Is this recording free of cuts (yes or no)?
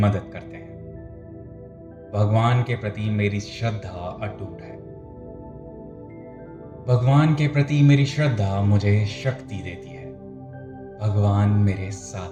yes